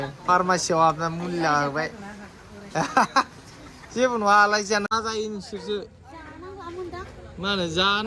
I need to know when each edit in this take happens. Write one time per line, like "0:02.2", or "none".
0:04.9